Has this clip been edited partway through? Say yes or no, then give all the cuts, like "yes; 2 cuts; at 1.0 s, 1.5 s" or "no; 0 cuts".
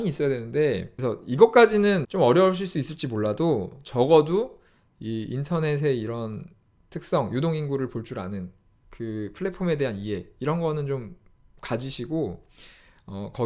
yes; 2 cuts; at 0.9 s, 2.0 s